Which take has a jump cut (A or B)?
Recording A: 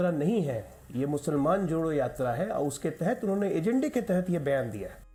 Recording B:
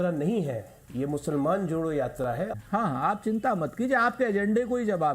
B